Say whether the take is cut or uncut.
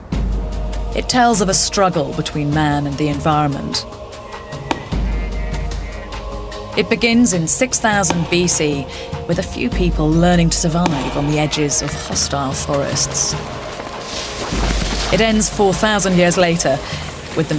cut